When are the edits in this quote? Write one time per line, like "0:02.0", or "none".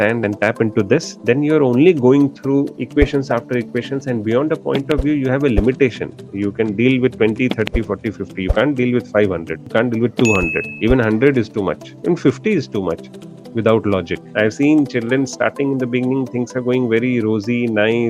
0:01.1
0:02.8
0:09.5
0:10.7
0:14.2